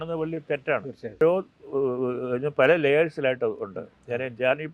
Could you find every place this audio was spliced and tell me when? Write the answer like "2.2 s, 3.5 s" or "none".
1.2 s